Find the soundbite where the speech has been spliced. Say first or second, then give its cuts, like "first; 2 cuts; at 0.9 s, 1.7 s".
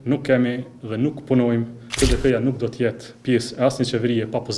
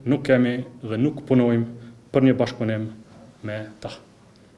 first; 1 cut; at 2.0 s